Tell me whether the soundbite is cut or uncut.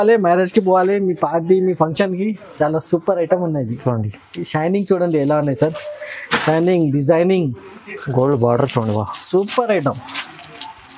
uncut